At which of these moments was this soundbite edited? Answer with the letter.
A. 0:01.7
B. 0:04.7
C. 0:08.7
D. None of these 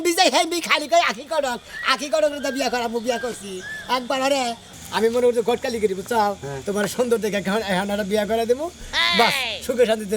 B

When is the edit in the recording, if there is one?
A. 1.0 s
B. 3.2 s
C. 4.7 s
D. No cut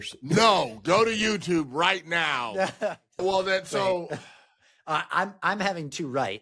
B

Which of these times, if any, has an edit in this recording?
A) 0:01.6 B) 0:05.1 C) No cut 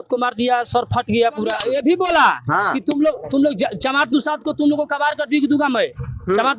A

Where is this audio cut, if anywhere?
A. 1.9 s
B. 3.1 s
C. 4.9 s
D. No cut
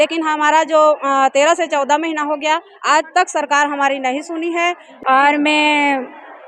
C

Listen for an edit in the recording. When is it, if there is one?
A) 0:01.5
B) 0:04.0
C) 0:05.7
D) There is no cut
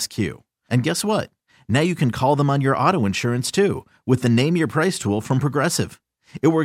D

